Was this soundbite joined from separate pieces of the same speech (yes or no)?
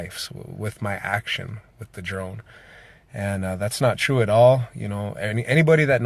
no